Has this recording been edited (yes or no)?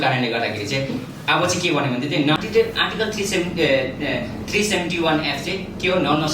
yes